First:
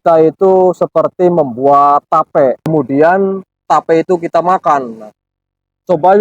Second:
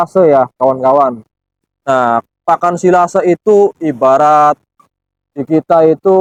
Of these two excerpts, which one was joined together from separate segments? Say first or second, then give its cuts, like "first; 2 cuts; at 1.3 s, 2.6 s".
first; 1 cut; at 2.6 s